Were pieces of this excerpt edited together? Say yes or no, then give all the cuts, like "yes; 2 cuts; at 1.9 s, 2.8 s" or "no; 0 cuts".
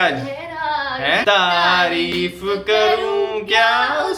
yes; 1 cut; at 1.2 s